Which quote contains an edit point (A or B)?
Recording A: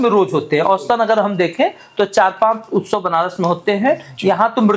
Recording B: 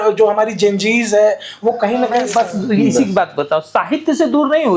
B